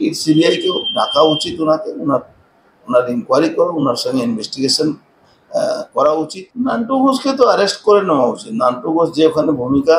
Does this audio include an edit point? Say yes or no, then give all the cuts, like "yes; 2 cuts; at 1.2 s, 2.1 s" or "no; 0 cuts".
yes; 1 cut; at 6.4 s